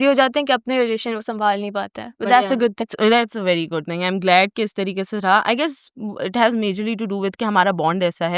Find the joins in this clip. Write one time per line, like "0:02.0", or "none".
none